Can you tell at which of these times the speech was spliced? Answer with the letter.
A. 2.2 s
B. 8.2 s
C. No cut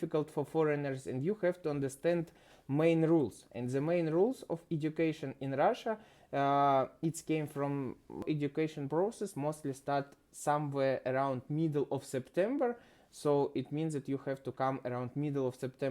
B